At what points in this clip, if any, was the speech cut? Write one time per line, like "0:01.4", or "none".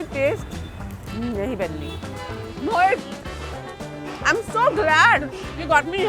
0:02.4